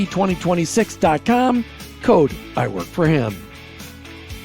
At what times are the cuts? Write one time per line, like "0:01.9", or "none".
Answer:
0:03.4